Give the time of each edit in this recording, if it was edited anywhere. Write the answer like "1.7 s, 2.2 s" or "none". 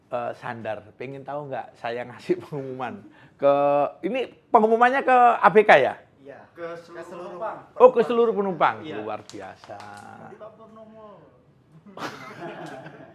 none